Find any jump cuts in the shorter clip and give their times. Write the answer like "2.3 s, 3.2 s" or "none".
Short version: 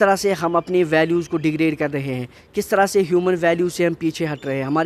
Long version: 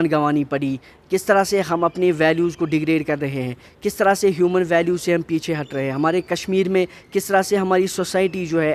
none